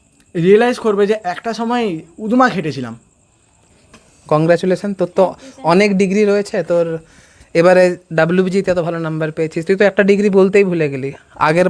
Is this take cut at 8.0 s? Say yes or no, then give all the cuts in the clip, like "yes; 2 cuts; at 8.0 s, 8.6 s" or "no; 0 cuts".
no; 1 cut; at 3.8 s